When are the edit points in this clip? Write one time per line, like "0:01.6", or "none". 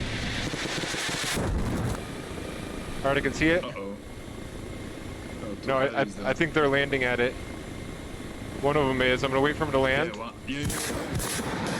0:01.9